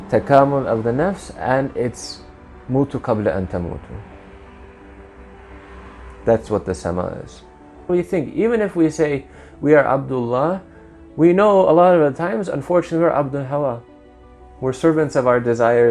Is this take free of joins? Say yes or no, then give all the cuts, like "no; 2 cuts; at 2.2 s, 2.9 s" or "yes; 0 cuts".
no; 1 cut; at 7.9 s